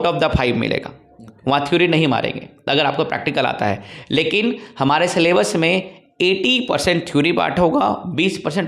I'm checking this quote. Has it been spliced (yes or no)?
no